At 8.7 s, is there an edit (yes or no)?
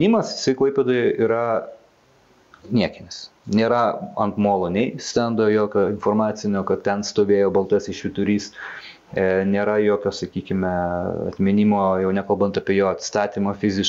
no